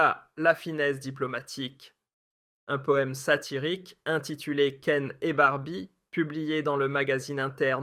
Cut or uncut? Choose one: uncut